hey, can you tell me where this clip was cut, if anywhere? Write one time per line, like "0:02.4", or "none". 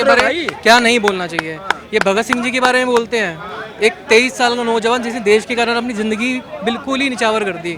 none